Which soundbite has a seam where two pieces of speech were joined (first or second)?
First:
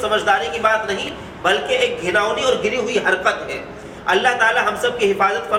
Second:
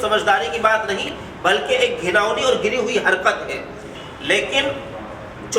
second